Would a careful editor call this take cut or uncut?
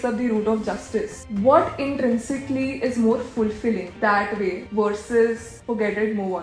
cut